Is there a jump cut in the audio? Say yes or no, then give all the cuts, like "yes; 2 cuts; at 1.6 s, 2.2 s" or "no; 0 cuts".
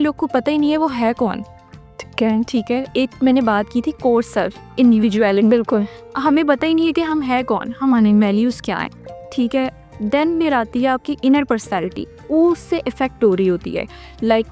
no; 0 cuts